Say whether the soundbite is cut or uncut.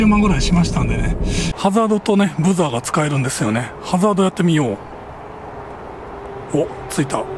cut